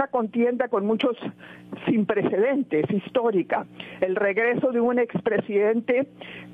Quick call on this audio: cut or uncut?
uncut